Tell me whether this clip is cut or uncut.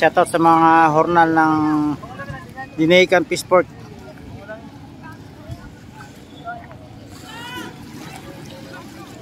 uncut